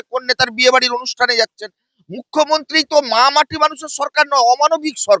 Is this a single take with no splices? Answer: yes; 0 cuts

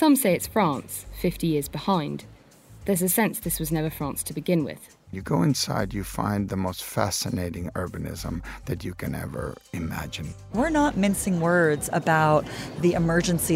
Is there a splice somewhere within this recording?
yes; 2 cuts; at 5.2 s, 10.5 s

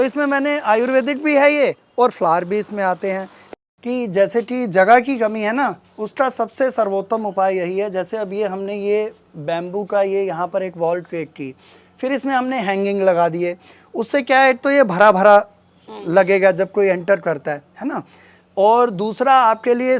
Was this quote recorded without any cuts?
no; 1 cut; at 3.5 s

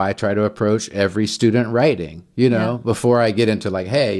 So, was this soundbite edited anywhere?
no; 0 cuts

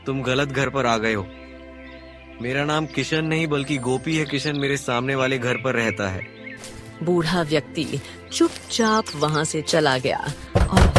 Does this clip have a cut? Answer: no; 0 cuts

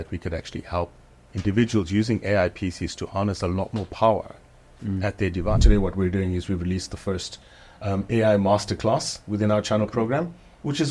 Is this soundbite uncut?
no; 1 cut; at 5.6 s

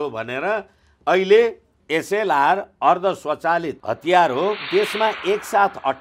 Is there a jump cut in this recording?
yes; 3 cuts; at 1.8 s, 3.8 s, 4.6 s

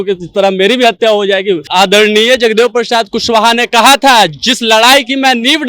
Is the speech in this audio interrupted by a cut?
yes; 1 cut; at 1.7 s

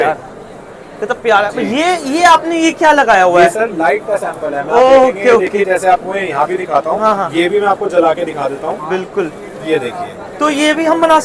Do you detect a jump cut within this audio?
no; 0 cuts

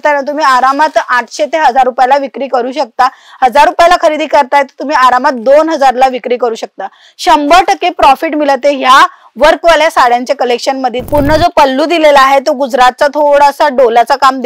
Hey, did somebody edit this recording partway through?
yes; 1 cut; at 11.1 s

